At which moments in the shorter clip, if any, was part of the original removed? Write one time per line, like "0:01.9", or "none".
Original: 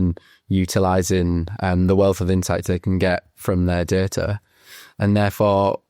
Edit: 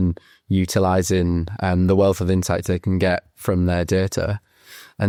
none